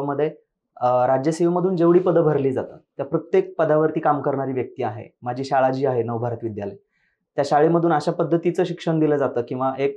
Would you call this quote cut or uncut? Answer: uncut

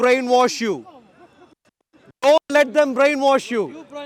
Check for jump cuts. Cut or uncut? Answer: uncut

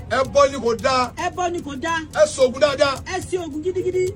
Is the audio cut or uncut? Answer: uncut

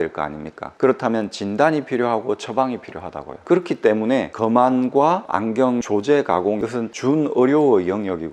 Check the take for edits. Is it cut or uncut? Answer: uncut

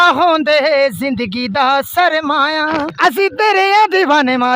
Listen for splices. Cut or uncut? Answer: cut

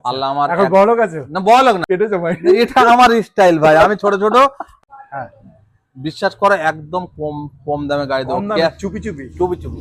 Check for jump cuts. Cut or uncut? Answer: cut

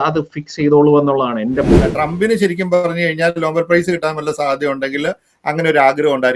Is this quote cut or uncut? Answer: cut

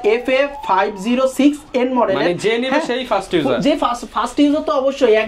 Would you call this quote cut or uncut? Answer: uncut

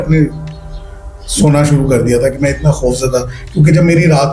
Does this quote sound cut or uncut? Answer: uncut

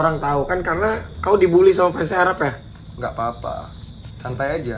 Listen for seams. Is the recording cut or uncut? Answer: uncut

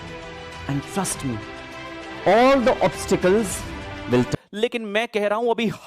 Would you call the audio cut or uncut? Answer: cut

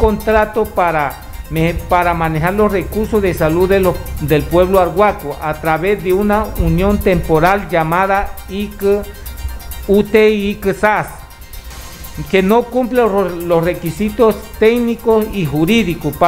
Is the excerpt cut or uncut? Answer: uncut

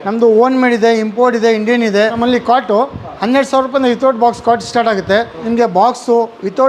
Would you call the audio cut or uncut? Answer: cut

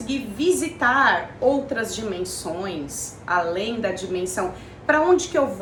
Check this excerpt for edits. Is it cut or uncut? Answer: uncut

